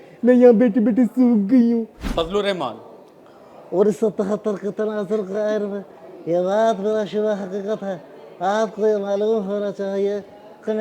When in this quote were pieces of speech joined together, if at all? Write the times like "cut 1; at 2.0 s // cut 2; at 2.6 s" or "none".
cut 1; at 2.0 s